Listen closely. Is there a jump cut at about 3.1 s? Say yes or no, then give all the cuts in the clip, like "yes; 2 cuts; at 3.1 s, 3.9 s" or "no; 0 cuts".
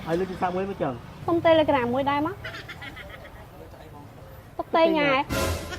no; 1 cut; at 1.1 s